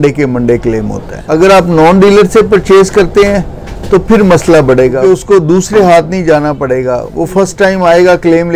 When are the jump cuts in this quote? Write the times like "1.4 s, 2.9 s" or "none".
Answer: 1.2 s, 5.0 s